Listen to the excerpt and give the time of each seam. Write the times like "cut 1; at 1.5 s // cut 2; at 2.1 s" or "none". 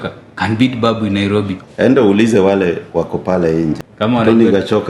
cut 1; at 1.6 s // cut 2; at 3.9 s